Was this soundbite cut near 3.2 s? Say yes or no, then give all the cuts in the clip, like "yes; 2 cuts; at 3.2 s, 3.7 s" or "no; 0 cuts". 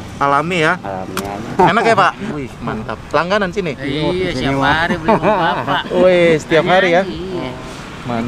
no; 1 cut; at 1.5 s